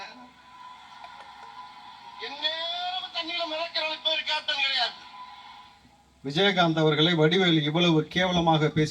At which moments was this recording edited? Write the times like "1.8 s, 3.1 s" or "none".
none